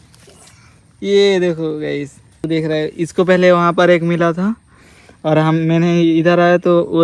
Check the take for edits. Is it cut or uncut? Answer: cut